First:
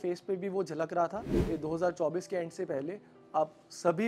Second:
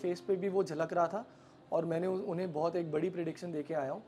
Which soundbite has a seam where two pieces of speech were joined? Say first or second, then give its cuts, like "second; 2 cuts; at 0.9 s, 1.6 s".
first; 1 cut; at 1.3 s